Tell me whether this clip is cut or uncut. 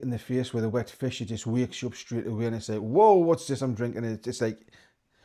uncut